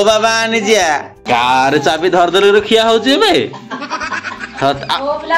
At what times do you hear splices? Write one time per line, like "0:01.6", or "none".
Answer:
0:01.1